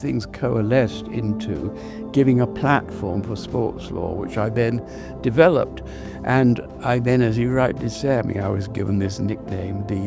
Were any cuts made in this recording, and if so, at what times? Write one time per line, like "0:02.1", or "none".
none